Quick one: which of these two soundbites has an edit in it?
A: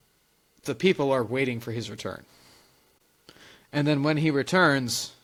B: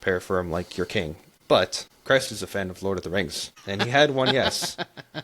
B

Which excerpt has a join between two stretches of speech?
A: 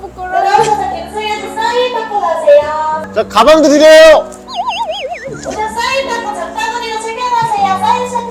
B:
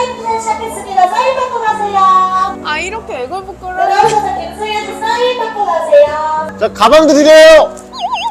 B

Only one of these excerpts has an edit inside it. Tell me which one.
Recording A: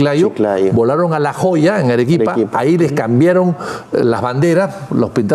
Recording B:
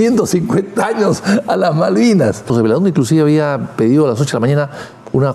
B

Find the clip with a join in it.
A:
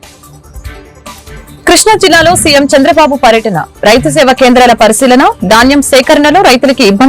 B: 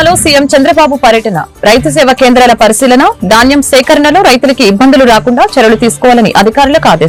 A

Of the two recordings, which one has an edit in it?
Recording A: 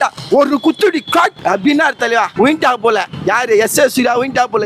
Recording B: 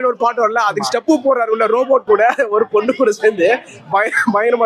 A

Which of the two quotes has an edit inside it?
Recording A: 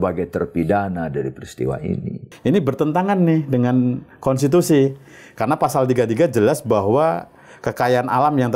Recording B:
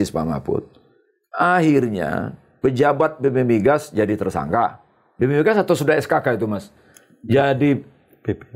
A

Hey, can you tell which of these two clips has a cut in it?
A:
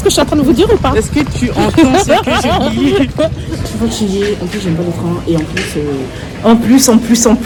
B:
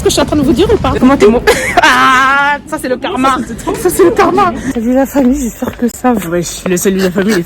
B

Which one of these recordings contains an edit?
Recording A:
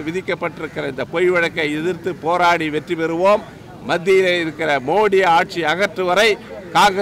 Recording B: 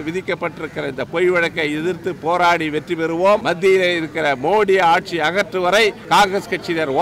B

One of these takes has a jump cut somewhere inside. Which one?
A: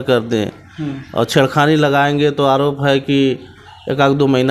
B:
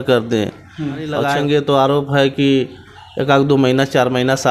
B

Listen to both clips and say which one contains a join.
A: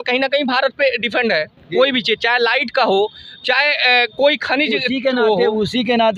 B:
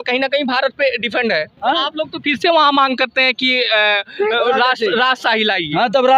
B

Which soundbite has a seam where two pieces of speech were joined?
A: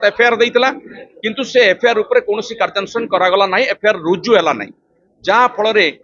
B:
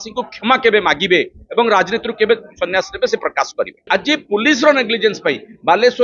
B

